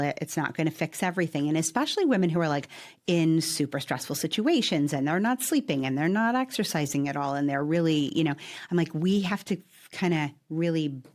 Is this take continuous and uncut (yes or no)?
yes